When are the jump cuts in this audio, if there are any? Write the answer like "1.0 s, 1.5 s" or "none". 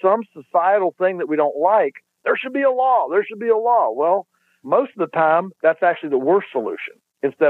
5.5 s